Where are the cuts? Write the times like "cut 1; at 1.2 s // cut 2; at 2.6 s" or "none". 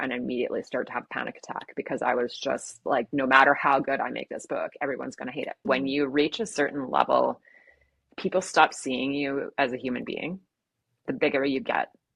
cut 1; at 5.7 s // cut 2; at 10.9 s